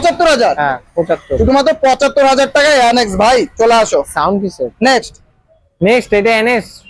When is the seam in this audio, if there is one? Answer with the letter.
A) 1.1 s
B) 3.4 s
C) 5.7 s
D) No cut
D